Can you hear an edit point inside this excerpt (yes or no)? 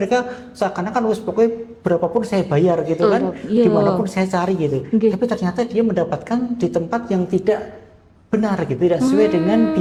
no